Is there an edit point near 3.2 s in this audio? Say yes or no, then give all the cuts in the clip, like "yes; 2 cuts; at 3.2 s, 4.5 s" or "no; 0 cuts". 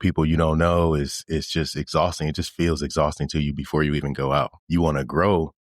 no; 1 cut; at 4.6 s